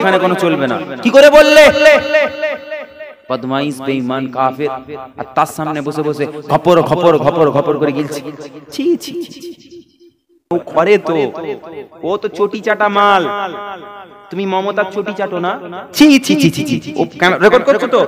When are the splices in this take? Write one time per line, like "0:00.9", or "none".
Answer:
0:10.5